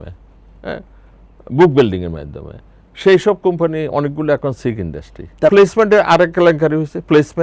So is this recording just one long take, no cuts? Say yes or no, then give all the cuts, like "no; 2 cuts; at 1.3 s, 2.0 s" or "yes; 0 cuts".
no; 1 cut; at 5.5 s